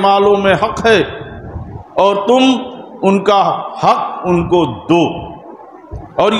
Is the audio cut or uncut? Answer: uncut